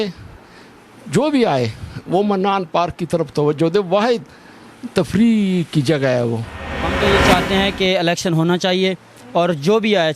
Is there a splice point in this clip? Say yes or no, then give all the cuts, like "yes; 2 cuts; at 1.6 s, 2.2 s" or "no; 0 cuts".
yes; 1 cut; at 6.9 s